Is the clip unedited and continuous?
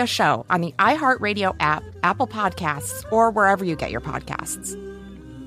no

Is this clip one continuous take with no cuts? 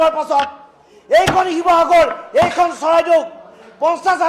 yes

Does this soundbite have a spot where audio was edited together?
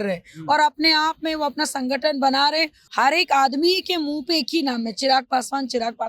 yes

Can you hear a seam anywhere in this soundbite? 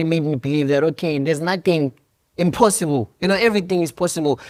no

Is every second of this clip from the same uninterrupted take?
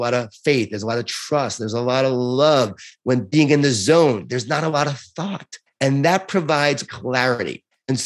no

